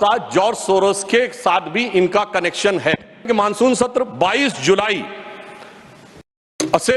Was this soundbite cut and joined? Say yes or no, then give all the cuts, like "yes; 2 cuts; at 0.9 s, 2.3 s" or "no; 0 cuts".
yes; 1 cut; at 3.2 s